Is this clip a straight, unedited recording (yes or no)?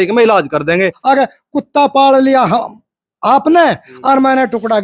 no